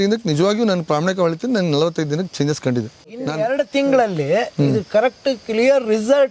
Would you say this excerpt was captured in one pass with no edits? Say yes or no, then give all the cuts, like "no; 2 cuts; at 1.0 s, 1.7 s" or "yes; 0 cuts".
yes; 0 cuts